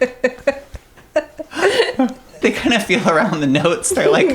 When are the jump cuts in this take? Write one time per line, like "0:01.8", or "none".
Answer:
0:02.4